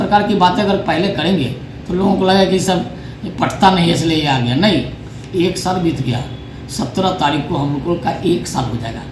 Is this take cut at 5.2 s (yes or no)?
no